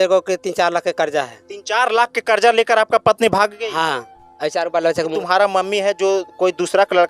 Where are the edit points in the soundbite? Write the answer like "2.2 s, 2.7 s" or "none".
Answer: 5.2 s